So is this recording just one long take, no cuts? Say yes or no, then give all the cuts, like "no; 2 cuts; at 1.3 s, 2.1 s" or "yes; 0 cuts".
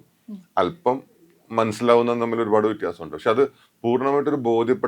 yes; 0 cuts